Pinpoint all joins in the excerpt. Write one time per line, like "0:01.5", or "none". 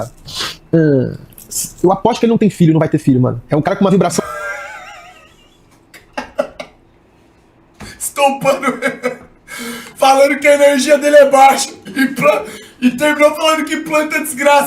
0:11.8